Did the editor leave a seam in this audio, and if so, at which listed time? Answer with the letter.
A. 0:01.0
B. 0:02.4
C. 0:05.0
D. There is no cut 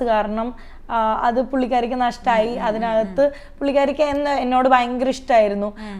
D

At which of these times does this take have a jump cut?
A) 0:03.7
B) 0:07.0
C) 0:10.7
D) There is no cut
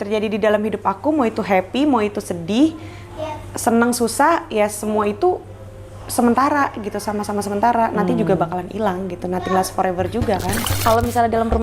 C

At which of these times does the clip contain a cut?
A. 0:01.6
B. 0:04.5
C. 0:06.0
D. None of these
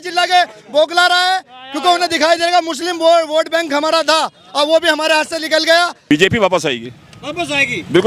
C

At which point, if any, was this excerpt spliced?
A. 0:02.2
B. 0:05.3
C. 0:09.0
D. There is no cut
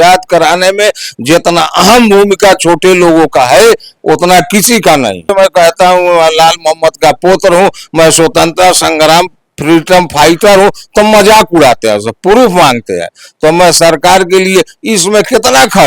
B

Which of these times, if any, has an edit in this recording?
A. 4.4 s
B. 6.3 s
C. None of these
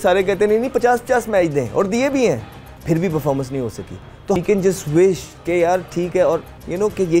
A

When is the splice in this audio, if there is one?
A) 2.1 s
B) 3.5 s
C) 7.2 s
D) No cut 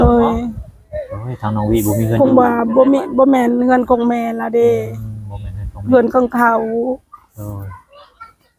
D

